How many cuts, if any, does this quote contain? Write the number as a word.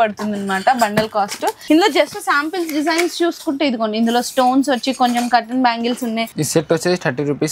two